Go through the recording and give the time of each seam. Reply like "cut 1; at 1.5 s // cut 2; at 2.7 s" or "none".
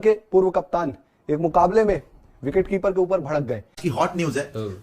cut 1; at 3.8 s

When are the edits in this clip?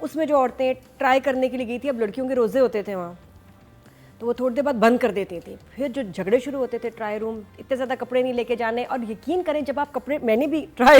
none

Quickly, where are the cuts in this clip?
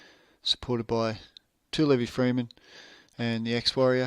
cut 1; at 1.9 s

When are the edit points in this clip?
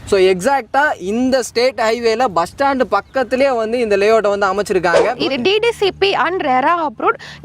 cut 1; at 5.1 s

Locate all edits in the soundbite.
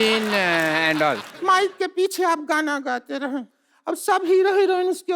cut 1; at 1.3 s

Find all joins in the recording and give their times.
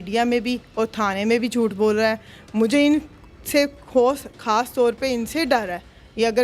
none

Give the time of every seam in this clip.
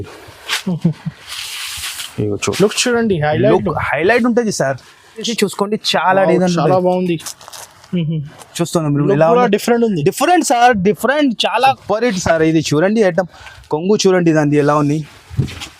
cut 1; at 5.3 s // cut 2; at 11.8 s

